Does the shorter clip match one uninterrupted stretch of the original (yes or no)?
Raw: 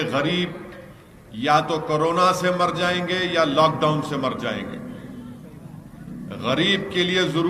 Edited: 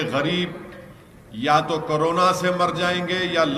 yes